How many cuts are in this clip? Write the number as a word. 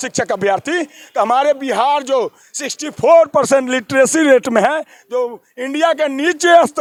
zero